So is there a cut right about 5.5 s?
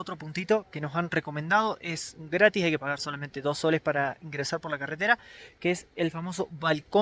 no; 0 cuts

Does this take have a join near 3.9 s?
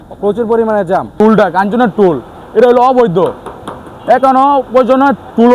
no; 1 cut; at 1.1 s

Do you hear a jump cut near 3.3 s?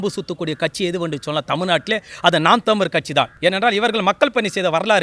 yes; 1 cut; at 3.3 s

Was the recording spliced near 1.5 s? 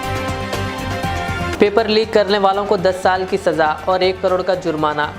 yes; 1 cut; at 1.5 s

